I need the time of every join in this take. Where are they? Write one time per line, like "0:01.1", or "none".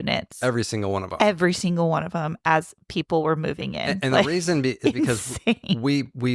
none